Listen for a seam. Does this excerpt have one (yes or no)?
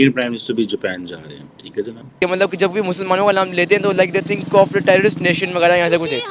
yes